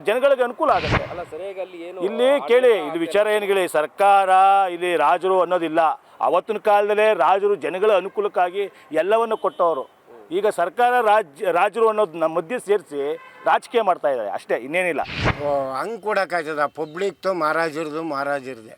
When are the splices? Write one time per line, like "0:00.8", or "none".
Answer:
0:15.2